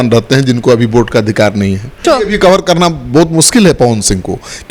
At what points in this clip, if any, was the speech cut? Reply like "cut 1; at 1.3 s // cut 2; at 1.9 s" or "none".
cut 1; at 2.0 s